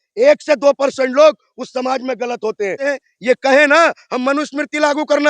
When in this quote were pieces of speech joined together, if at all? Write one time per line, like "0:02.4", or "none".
0:02.9

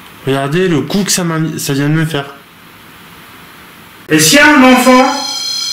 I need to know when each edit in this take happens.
0:04.1

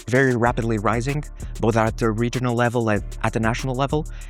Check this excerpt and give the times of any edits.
none

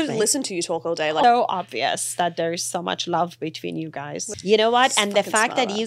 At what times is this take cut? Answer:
0:01.2
0:04.2

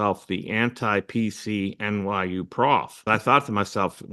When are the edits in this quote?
0:03.1

